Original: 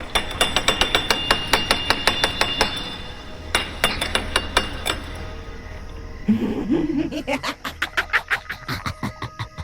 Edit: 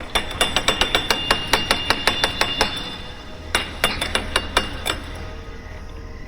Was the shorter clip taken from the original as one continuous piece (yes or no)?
yes